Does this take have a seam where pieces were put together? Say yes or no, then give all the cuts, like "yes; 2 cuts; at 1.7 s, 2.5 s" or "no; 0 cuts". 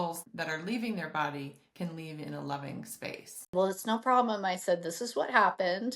yes; 1 cut; at 3.5 s